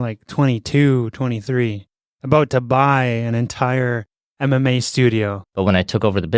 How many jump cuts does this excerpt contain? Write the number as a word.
one